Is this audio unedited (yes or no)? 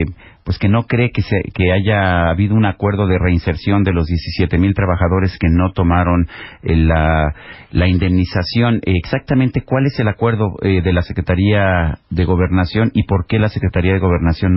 no